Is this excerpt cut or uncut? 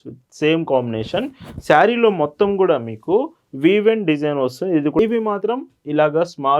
cut